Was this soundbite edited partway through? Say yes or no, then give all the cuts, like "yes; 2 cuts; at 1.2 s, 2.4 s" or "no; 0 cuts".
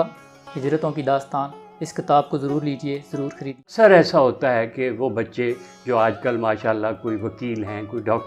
yes; 1 cut; at 3.7 s